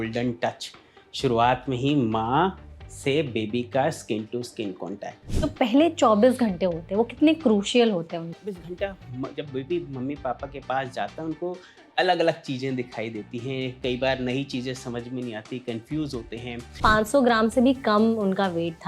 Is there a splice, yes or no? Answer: yes